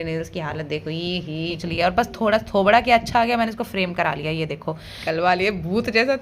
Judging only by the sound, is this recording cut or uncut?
cut